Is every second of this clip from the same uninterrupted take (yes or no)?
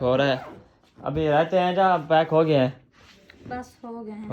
yes